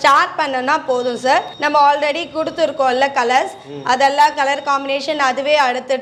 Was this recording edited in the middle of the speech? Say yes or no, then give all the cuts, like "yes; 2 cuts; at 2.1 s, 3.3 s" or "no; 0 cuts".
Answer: no; 0 cuts